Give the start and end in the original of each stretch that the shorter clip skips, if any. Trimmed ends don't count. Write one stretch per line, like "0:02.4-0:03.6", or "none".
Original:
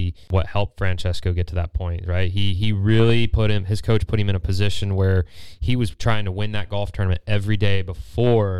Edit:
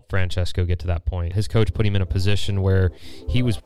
0:02.0-0:03.7